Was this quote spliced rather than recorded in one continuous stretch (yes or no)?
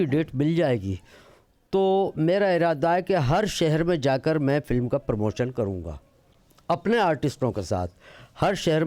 no